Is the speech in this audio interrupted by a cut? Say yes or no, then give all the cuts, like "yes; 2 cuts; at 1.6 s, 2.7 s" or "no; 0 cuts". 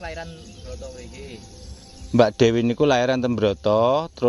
no; 0 cuts